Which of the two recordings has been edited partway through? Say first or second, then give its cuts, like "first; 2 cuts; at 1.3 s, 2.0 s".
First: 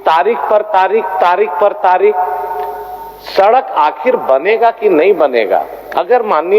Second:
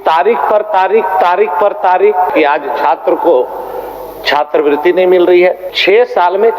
second; 2 cuts; at 2.3 s, 5.7 s